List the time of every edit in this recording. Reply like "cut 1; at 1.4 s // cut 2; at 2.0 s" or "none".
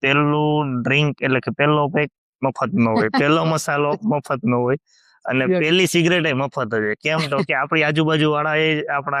none

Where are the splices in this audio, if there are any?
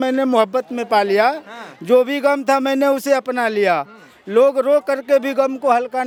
none

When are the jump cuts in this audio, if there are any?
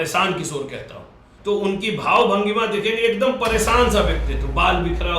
cut 1; at 1.3 s

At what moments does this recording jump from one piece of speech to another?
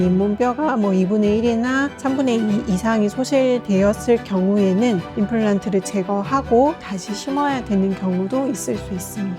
none

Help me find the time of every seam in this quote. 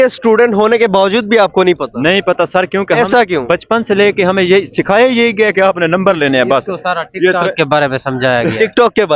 none

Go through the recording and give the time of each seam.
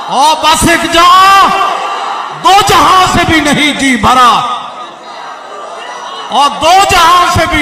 none

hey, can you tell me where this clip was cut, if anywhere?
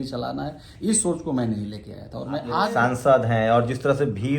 cut 1; at 2.6 s

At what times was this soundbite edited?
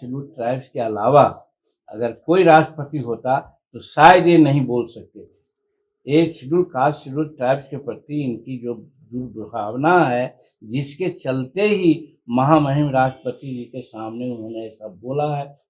none

